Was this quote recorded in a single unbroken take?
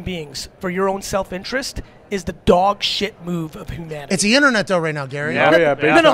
yes; 0 cuts

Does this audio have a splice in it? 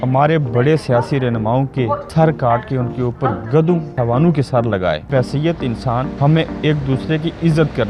yes; 4 cuts; at 2.1 s, 3.9 s, 5.1 s, 6.1 s

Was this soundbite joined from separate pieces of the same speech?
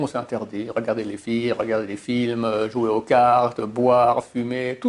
no; 0 cuts

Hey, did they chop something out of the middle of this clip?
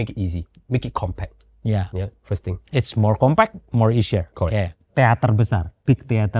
yes; 1 cut; at 4.9 s

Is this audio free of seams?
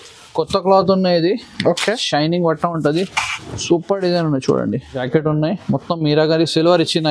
no; 1 cut; at 5.1 s

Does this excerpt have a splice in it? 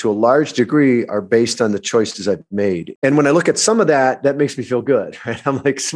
yes; 1 cut; at 2.9 s

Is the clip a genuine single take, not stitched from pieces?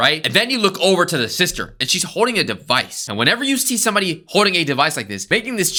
yes; 0 cuts

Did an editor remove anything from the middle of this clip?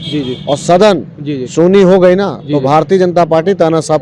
no; 0 cuts

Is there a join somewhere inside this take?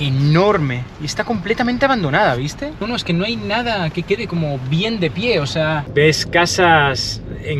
yes; 2 cuts; at 2.8 s, 5.8 s

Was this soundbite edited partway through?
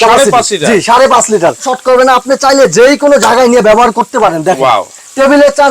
yes; 1 cut; at 1.7 s

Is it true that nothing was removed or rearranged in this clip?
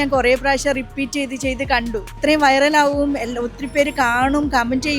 no; 1 cut; at 2.1 s

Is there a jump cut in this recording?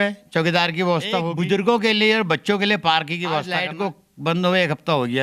yes; 2 cuts; at 1.3 s, 3.5 s

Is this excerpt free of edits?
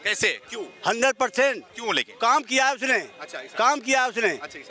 yes; 0 cuts

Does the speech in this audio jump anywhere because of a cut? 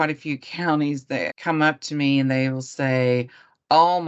yes; 1 cut; at 1.3 s

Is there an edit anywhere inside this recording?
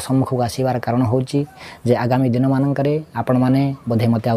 no; 0 cuts

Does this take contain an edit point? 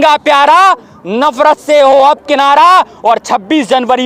no; 0 cuts

